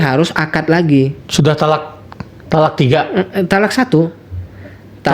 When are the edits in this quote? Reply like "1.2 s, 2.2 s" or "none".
1.2 s